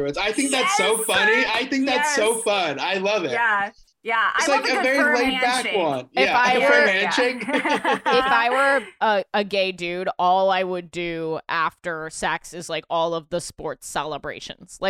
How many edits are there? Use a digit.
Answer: 0